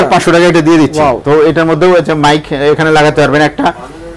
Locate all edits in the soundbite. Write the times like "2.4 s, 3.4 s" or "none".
none

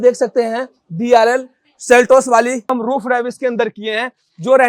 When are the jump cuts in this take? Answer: 2.7 s

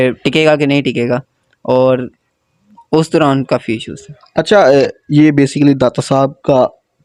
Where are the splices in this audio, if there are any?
none

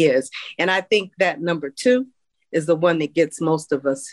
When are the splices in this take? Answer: none

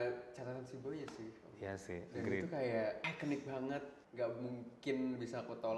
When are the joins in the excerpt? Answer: 3.1 s, 4.0 s

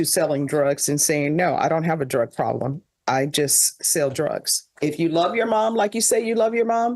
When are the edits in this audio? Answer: 4.7 s

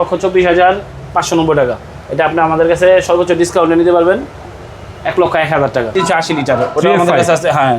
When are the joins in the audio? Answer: 5.9 s

